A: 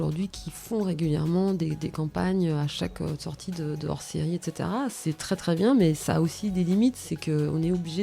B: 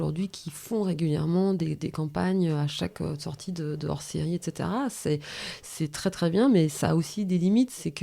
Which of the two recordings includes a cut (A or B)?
A